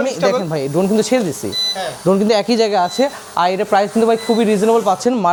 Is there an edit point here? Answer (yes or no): no